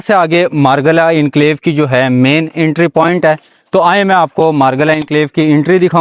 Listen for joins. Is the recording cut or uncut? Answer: uncut